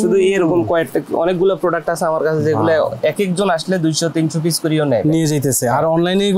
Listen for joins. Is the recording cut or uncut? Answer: uncut